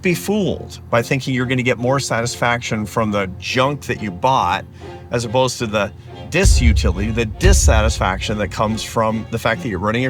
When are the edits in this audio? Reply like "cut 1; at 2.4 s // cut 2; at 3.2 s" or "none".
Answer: none